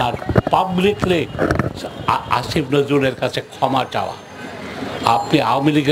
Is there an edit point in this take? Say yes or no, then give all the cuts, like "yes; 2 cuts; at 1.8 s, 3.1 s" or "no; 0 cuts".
no; 0 cuts